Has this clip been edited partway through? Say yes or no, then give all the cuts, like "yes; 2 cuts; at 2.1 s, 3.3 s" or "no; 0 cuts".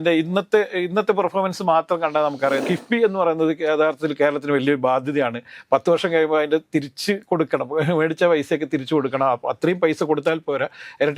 yes; 1 cut; at 2.6 s